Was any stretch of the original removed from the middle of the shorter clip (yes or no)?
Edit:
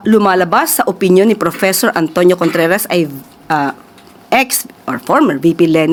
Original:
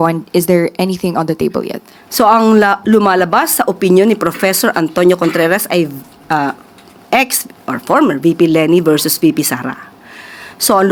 no